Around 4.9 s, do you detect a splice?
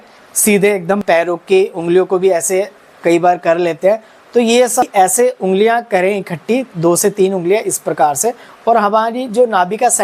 yes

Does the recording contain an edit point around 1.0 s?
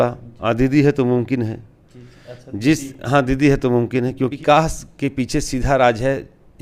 no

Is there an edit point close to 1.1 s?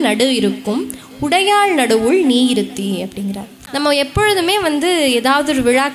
no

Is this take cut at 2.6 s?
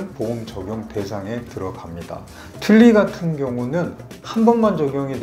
yes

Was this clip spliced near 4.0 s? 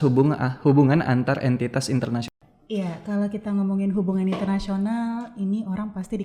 no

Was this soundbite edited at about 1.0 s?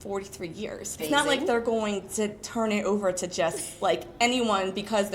yes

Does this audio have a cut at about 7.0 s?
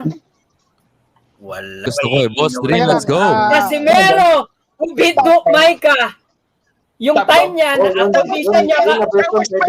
no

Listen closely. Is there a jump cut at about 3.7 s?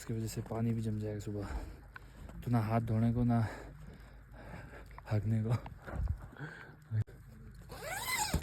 no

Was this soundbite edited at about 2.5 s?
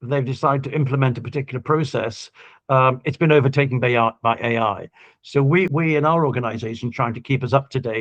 no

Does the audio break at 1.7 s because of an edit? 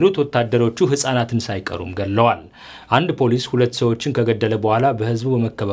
yes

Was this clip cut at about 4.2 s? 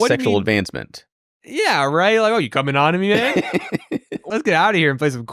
yes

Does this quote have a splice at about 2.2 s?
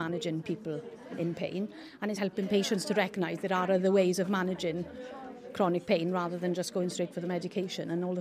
yes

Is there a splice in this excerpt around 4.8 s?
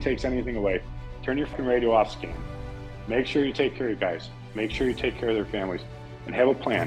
no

